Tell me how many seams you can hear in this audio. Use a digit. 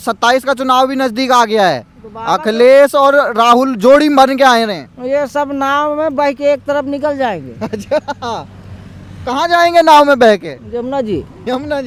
0